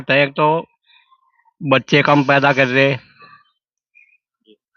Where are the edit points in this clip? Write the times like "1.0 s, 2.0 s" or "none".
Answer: none